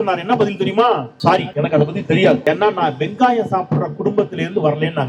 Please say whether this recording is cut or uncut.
cut